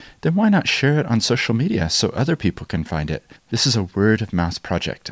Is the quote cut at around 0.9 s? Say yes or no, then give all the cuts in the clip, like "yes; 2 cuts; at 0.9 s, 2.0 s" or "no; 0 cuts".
no; 1 cut; at 3.4 s